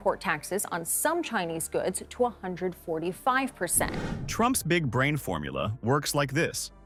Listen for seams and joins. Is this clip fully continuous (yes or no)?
yes